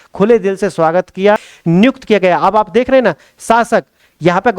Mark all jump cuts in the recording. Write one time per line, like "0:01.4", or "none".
0:01.5

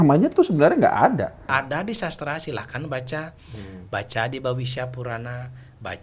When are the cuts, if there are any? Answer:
0:01.5

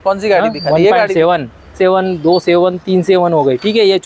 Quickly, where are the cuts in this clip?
0:01.7

